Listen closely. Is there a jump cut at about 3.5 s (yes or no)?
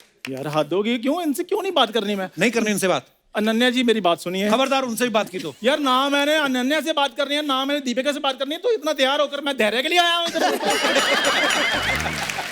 no